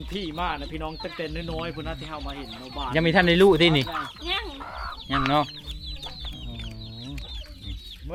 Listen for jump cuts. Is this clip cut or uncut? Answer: uncut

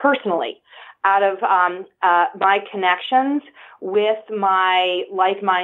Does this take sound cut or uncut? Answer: uncut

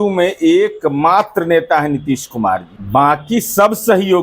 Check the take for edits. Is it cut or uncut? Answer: cut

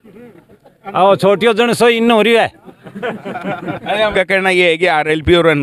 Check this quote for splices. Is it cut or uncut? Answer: cut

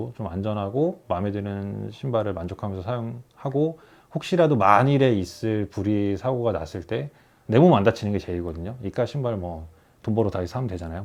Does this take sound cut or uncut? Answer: uncut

